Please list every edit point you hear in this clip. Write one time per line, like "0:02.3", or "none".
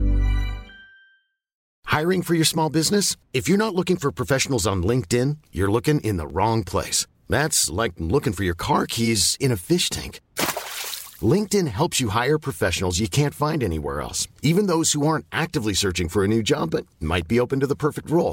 0:01.6